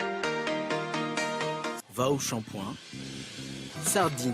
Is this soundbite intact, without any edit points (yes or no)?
no